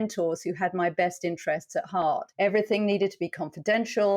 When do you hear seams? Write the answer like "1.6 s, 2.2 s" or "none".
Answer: 2.3 s